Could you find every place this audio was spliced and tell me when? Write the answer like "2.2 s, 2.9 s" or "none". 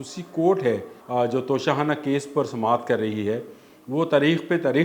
0.9 s